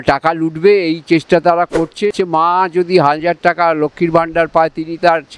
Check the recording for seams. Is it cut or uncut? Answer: cut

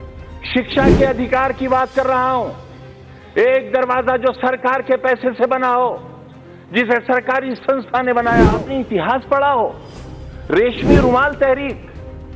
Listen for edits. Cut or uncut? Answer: cut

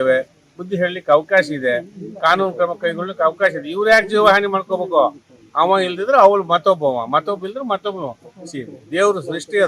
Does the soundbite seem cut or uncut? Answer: uncut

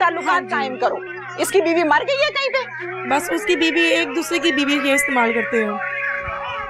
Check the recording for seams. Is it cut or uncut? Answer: uncut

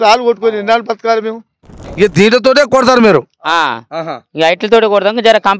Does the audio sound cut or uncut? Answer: cut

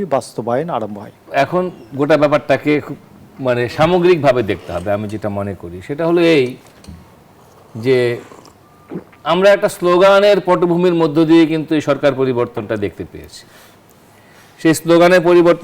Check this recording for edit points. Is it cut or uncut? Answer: cut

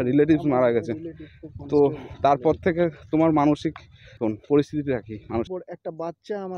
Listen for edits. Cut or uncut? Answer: cut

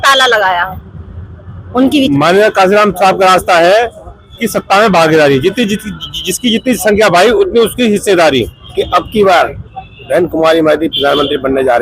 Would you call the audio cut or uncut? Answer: cut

